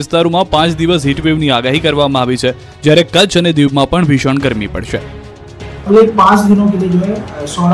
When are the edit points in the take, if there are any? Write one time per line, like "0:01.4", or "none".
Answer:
0:02.7